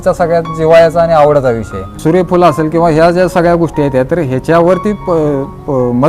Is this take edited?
yes; 1 cut; at 1.9 s

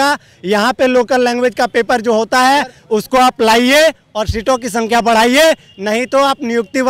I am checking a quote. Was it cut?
no; 0 cuts

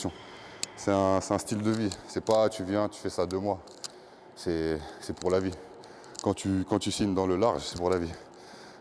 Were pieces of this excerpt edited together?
yes; 1 cut; at 7.7 s

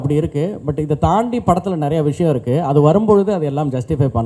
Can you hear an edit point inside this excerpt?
no; 0 cuts

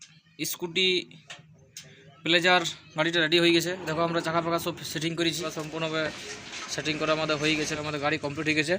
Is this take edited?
yes; 2 cuts; at 5.4 s, 7.6 s

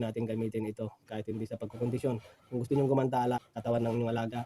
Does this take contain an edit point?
yes; 1 cut; at 3.4 s

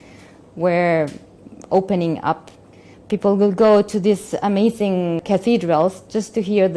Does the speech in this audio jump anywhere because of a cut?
yes; 2 cuts; at 2.7 s, 5.2 s

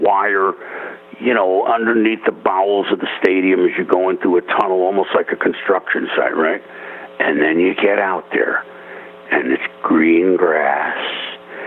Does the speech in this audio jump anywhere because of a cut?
no; 0 cuts

